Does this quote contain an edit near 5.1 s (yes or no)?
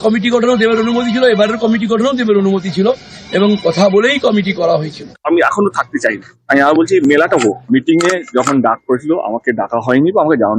no